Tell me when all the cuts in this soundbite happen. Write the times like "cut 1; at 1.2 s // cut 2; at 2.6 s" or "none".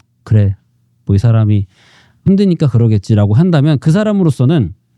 cut 1; at 2.2 s

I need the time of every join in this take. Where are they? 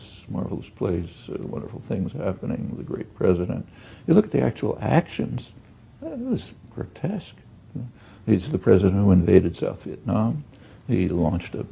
cut 1; at 2.5 s

